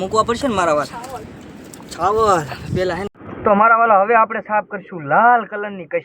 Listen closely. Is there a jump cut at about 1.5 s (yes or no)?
no